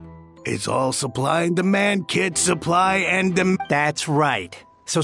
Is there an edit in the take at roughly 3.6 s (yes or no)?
yes